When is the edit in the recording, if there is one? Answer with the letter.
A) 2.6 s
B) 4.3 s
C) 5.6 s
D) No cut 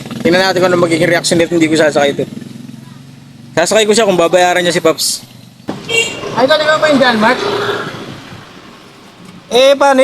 C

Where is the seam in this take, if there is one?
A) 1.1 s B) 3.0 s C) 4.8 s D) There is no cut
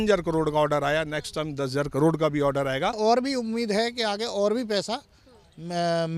B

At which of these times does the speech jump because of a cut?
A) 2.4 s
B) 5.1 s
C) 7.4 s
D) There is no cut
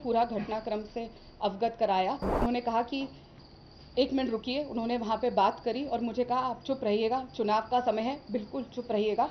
A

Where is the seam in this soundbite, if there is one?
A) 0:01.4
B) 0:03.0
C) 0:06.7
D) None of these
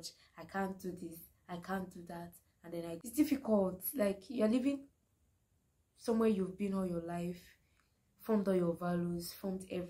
B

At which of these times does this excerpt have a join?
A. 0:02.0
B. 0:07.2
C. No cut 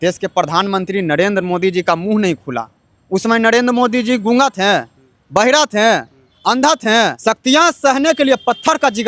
B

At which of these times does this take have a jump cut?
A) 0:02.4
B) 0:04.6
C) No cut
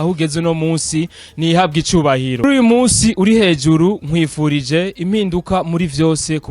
A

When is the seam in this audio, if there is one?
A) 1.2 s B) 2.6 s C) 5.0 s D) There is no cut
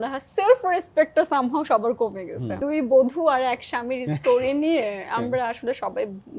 B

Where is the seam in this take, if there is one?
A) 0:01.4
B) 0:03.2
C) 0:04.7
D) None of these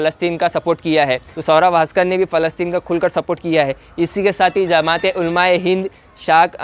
A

